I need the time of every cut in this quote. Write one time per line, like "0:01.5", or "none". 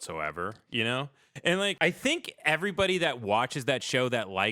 0:01.8